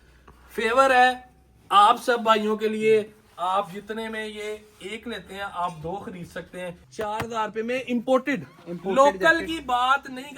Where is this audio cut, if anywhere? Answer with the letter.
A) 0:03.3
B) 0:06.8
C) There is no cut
B